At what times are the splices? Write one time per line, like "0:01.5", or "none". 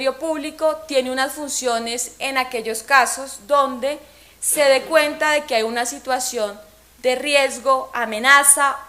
0:07.4